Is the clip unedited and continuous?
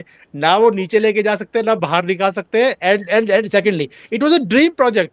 yes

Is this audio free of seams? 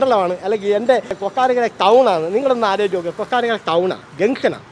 yes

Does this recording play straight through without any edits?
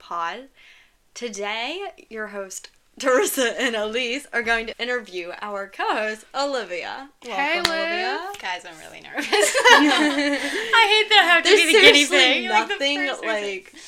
no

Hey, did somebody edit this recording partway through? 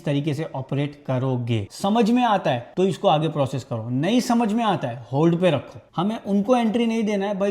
yes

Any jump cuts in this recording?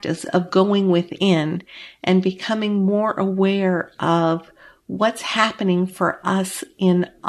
no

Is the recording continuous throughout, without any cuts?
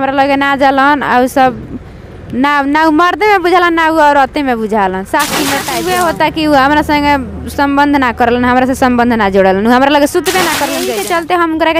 no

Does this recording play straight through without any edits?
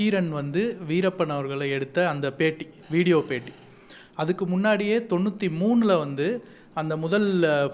yes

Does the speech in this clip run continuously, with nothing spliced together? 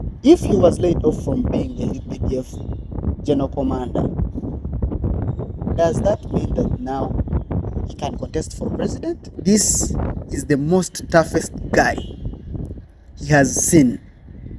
no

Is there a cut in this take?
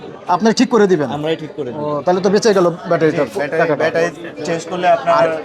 no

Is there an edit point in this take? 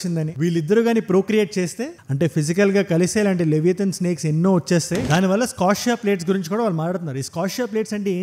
yes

